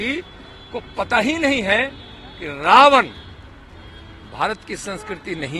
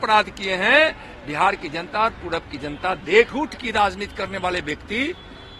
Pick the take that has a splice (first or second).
second